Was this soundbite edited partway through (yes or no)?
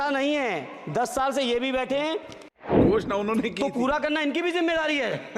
yes